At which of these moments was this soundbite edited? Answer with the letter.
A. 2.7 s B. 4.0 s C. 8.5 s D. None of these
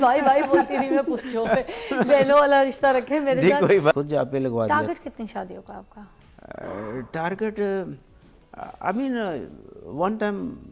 B